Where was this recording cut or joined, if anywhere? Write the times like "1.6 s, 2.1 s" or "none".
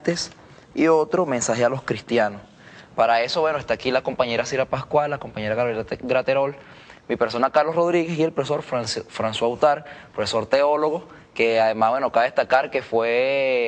9.5 s